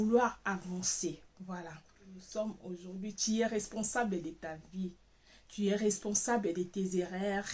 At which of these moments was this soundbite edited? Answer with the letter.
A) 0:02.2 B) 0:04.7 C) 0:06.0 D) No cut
A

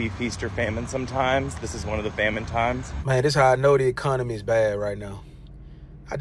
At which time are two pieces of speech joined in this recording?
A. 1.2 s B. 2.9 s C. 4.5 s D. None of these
B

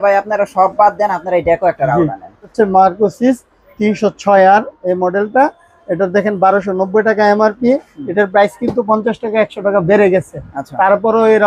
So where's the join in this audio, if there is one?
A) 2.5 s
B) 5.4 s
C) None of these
A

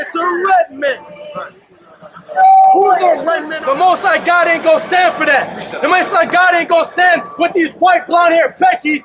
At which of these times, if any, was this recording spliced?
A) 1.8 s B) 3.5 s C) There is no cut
B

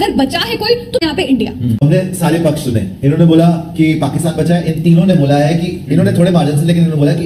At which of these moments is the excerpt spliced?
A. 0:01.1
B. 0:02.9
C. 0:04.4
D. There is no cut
A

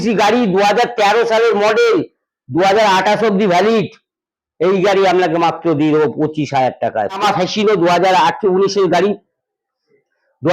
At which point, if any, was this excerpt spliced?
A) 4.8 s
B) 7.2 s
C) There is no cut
B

